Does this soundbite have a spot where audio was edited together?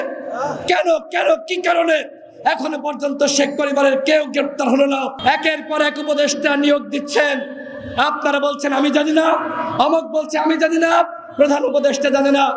yes; 1 cut; at 5.1 s

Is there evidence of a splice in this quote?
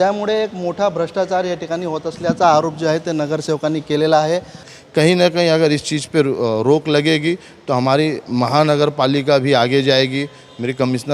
yes; 1 cut; at 4.7 s

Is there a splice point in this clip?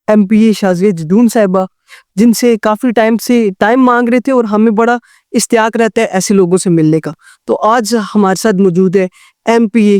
no; 0 cuts

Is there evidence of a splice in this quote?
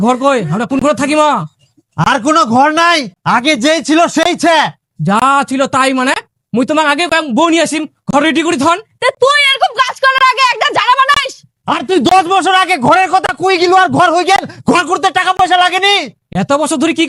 no; 0 cuts

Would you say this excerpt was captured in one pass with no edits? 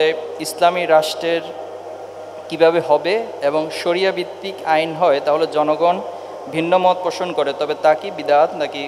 yes; 0 cuts

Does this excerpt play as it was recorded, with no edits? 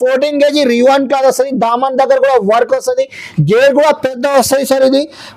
yes; 0 cuts

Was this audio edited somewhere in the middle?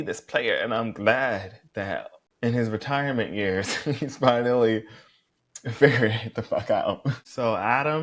no; 0 cuts

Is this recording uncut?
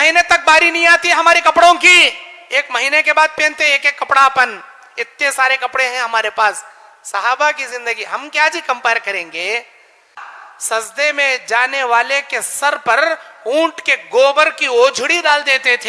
no; 1 cut; at 10.2 s

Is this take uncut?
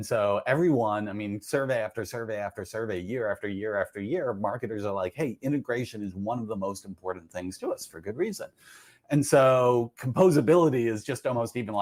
yes; 0 cuts

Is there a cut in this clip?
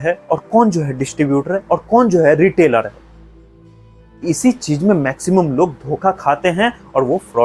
no; 0 cuts

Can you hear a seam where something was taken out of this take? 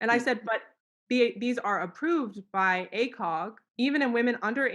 yes; 1 cut; at 3.6 s

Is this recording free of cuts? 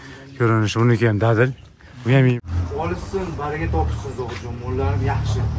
no; 1 cut; at 2.4 s

